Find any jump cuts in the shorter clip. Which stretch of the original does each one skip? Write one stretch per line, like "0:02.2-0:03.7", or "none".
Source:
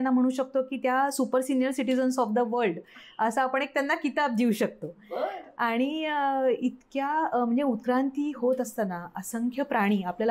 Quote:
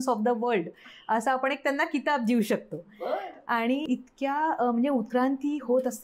0:06.0-0:06.6